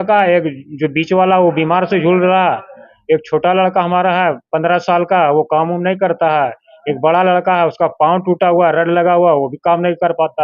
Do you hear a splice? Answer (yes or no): no